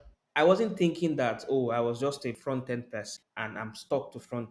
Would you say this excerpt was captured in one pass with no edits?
no; 2 cuts; at 2.4 s, 3.2 s

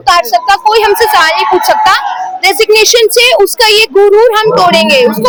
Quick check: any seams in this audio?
no; 0 cuts

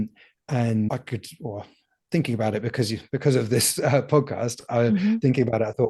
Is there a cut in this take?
no; 0 cuts

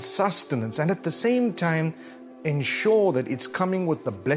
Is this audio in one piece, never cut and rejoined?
yes; 0 cuts

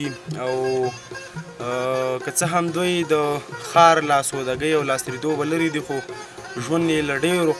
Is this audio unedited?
yes; 0 cuts

